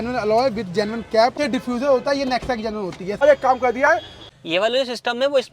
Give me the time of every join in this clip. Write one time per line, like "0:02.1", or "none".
0:01.3
0:03.2
0:04.3